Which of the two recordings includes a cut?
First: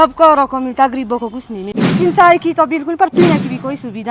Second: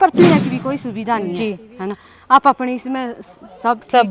first; 1 cut; at 1.8 s

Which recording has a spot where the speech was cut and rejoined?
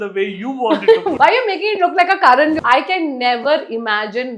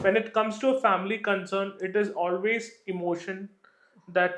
first; 2 cuts; at 1.1 s, 2.6 s

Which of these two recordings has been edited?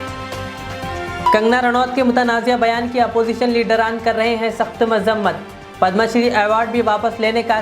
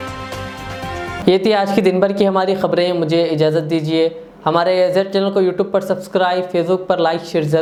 first; 1 cut; at 1.2 s

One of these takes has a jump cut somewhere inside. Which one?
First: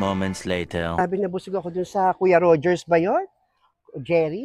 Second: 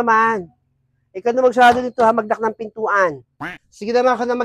first; 1 cut; at 1.0 s

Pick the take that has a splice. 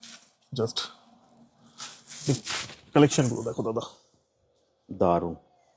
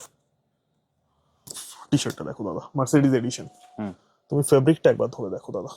second; 1 cut; at 1.6 s

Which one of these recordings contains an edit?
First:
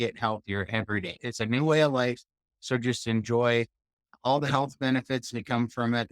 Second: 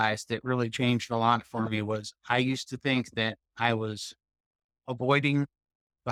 first; 1 cut; at 1.2 s

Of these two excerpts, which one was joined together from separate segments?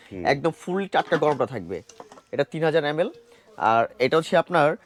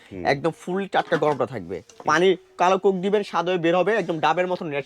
second; 1 cut; at 1.9 s

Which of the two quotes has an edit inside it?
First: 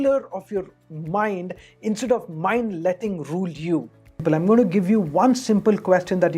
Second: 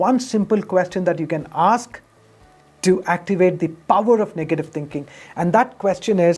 first; 1 cut; at 4.2 s

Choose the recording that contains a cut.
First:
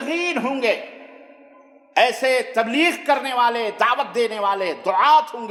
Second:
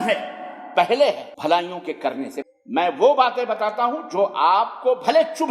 second; 2 cuts; at 1.3 s, 2.4 s

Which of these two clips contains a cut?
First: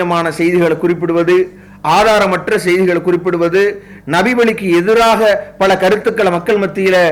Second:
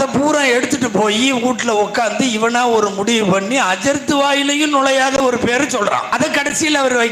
second; 1 cut; at 6.1 s

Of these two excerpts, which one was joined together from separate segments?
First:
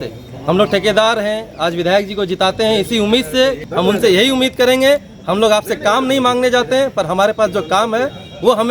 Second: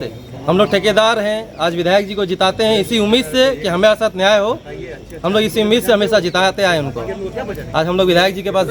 first; 1 cut; at 3.6 s

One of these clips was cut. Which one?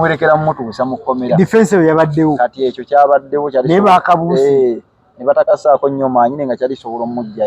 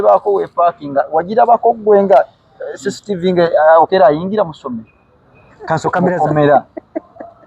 second; 1 cut; at 6.2 s

